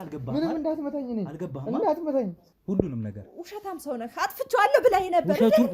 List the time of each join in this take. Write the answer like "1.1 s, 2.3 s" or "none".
2.5 s